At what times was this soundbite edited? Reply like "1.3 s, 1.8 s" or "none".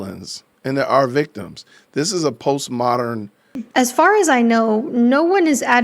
3.5 s